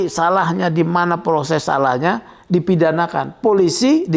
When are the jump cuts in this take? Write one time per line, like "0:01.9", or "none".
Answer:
none